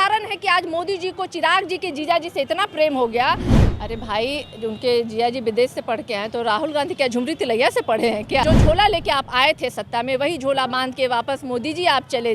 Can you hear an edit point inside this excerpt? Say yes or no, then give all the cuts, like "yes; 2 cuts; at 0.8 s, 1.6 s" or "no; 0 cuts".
yes; 2 cuts; at 3.5 s, 8.4 s